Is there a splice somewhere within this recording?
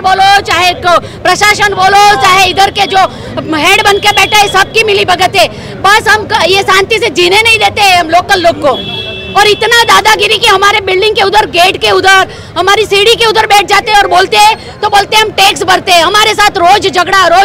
no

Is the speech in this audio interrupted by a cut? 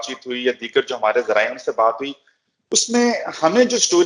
no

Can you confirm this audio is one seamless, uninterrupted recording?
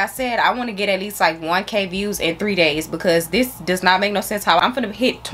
yes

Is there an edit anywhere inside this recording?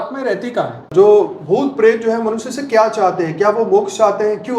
yes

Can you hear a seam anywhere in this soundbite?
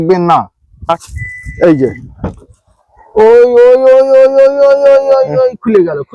yes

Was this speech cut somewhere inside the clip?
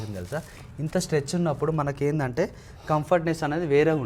no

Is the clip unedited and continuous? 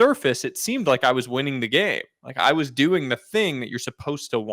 yes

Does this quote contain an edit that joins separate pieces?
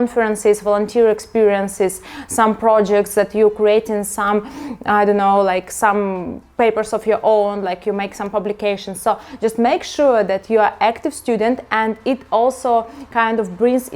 no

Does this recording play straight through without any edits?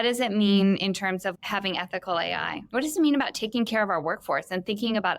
no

